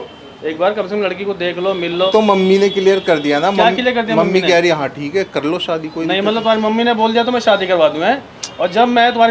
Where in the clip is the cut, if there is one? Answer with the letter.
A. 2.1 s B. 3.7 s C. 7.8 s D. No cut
A